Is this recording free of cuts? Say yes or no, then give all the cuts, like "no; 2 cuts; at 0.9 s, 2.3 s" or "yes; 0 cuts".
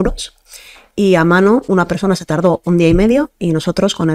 no; 1 cut; at 1.7 s